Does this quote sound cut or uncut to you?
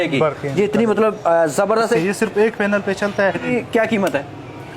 cut